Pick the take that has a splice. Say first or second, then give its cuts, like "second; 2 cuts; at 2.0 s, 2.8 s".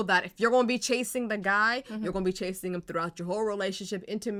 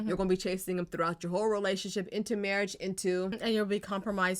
second; 1 cut; at 3.4 s